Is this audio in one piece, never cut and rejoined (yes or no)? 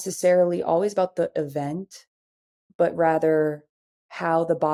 yes